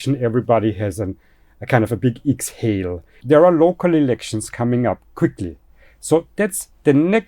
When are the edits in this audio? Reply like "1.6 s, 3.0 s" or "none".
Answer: 3.1 s